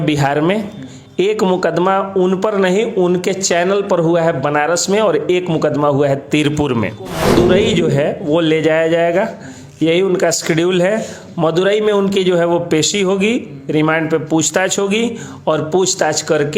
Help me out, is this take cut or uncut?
cut